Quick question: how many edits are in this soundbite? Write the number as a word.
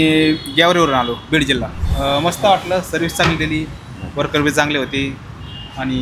one